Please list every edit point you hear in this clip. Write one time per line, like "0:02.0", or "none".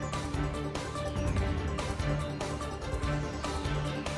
none